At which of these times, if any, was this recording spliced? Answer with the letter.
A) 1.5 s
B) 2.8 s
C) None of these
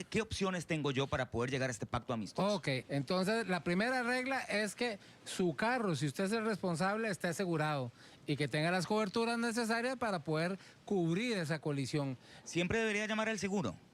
B